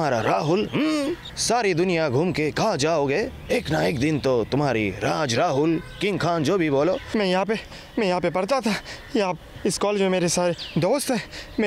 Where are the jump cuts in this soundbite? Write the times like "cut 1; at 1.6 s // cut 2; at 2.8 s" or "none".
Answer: cut 1; at 1.3 s // cut 2; at 7.0 s